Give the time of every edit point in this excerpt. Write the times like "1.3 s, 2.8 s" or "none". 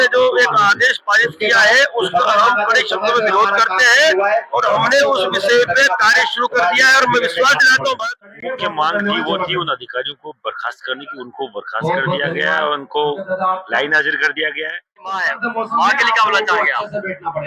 8.2 s, 15.3 s